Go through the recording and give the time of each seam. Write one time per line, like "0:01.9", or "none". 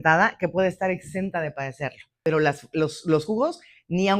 0:02.1